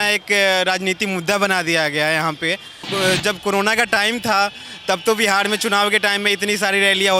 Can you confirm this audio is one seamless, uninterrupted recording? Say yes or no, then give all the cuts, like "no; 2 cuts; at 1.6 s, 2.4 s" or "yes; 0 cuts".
no; 1 cut; at 2.8 s